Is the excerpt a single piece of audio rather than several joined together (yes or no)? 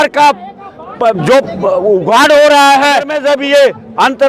no